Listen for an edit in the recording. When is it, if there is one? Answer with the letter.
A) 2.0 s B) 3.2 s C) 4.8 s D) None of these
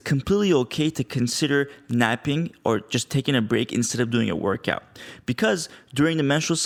D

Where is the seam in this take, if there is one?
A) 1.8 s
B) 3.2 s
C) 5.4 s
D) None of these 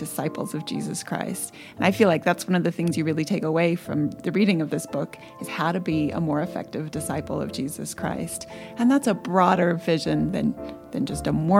D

